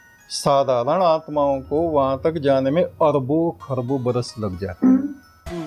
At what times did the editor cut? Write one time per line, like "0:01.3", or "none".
none